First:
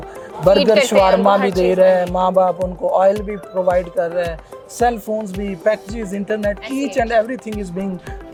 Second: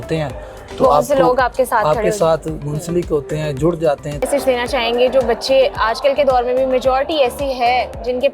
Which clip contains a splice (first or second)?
second